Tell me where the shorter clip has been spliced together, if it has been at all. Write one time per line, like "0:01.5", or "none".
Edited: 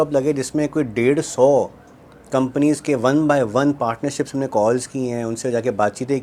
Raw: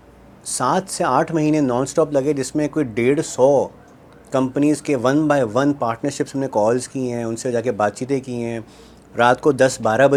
none